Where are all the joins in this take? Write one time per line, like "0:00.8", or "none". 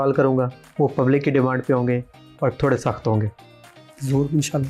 none